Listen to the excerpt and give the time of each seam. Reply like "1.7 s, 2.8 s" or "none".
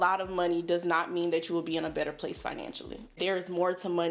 3.1 s